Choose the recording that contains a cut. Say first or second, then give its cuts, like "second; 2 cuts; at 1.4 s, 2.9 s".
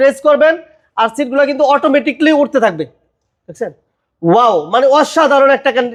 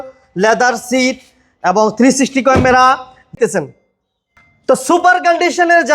second; 1 cut; at 3.3 s